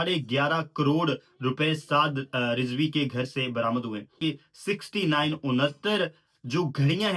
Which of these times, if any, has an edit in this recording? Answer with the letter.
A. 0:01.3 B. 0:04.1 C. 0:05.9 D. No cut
B